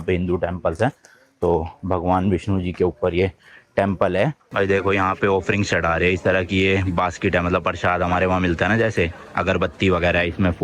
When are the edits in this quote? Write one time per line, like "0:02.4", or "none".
0:04.5